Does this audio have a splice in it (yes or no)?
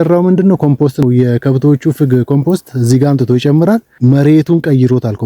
yes